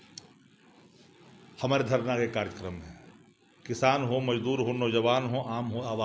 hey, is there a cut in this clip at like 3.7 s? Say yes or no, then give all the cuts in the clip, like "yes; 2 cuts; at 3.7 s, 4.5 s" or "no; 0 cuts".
no; 0 cuts